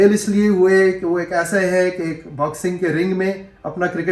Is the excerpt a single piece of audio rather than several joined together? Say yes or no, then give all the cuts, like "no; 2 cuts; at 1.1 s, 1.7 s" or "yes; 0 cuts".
yes; 0 cuts